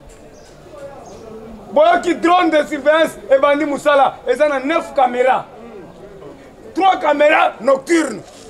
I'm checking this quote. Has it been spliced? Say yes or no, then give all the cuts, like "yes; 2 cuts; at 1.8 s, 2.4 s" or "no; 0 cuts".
no; 0 cuts